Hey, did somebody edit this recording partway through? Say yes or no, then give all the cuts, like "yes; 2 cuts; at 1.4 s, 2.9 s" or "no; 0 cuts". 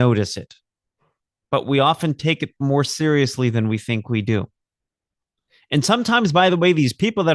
no; 0 cuts